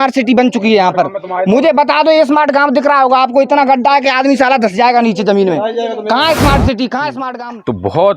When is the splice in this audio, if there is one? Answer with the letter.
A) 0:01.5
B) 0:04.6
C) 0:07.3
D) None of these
C